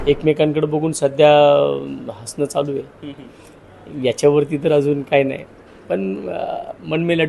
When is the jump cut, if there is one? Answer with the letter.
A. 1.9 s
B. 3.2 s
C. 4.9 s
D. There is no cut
D